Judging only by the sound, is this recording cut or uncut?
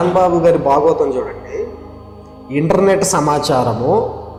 uncut